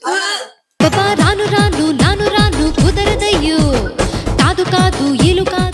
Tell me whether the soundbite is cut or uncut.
uncut